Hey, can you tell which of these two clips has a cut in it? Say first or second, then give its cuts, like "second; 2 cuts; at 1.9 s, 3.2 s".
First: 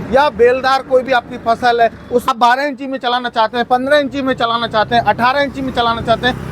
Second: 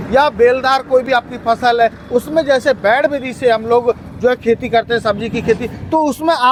first; 1 cut; at 2.3 s